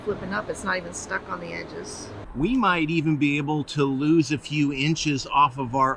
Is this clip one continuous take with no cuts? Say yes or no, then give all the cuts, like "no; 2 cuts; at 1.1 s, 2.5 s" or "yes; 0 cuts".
no; 1 cut; at 2.2 s